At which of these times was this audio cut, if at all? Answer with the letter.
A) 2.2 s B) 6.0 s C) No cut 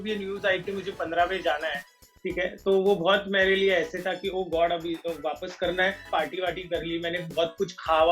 B